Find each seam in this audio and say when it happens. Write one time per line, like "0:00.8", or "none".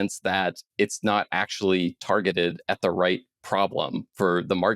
none

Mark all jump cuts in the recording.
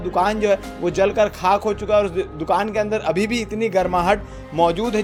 none

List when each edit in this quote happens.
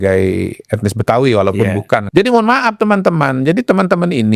0:02.1

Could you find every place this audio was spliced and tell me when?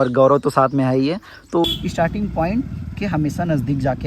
0:01.6

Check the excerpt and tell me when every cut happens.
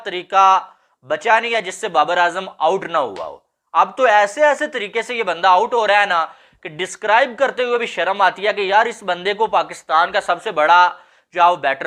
none

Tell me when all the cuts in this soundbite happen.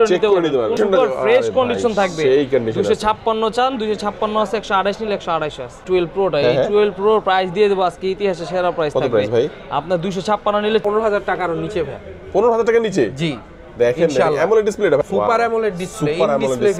0:00.8
0:05.8
0:10.8
0:15.0

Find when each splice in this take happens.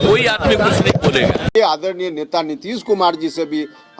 0:01.5

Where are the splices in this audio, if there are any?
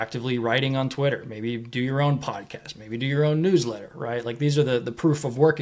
none

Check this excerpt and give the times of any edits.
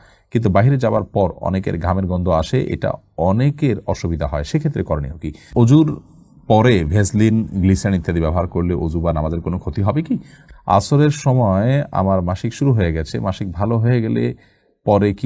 0:05.4
0:10.4

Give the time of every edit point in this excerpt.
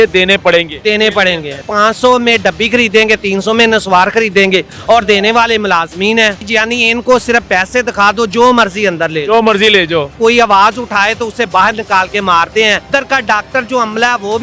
0:01.6
0:06.4
0:10.1
0:12.9

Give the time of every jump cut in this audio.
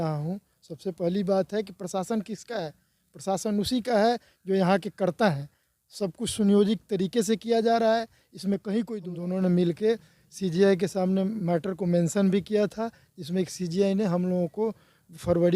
0:09.0

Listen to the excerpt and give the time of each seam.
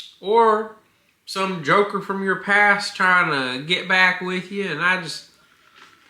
none

